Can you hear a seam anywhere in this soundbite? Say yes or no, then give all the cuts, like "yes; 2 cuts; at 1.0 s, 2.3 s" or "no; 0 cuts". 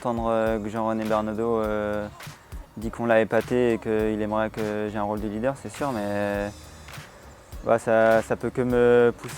no; 0 cuts